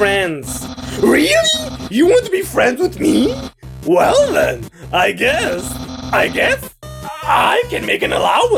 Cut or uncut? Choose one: uncut